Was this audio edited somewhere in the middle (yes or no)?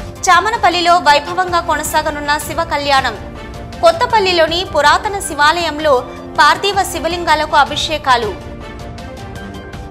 no